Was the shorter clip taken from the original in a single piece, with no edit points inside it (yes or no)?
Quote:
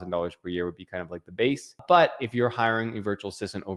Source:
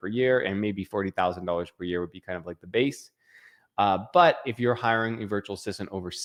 no